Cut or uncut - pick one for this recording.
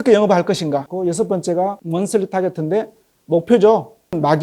cut